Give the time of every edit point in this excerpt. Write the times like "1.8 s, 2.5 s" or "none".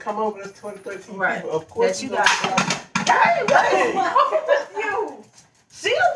none